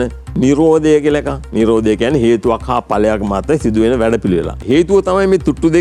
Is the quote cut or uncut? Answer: cut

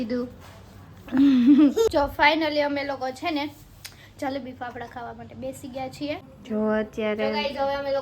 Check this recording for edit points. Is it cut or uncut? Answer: cut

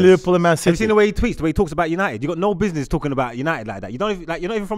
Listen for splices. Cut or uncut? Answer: uncut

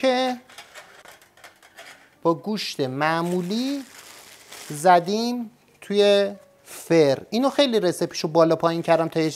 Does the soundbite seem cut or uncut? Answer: uncut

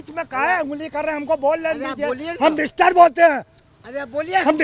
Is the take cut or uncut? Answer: uncut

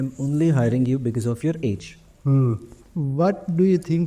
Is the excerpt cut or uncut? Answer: cut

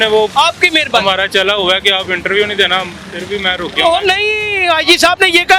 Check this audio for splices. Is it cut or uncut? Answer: uncut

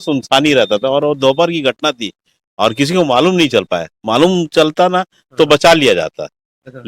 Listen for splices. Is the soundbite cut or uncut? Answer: uncut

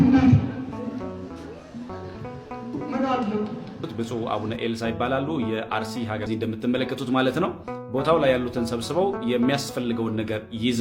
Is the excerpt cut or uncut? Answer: cut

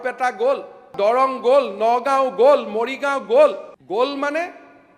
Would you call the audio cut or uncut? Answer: cut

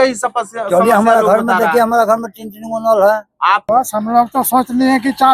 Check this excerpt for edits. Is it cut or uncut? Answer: cut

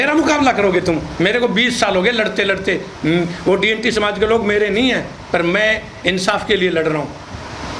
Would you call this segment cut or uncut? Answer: uncut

